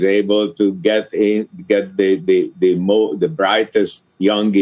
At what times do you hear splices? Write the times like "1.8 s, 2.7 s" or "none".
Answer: none